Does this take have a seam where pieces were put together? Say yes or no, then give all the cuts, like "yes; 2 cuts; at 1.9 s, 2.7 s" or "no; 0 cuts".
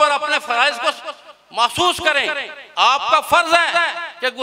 no; 0 cuts